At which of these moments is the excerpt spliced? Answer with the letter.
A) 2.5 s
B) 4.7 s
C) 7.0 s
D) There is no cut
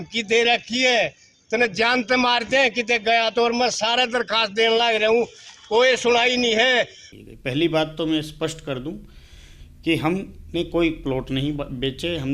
C